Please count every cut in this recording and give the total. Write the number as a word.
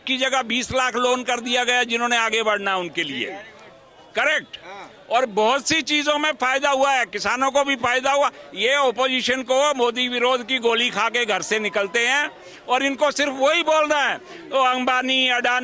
zero